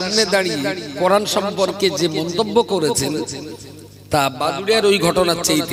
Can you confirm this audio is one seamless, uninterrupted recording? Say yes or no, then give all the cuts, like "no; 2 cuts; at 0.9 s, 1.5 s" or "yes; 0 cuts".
yes; 0 cuts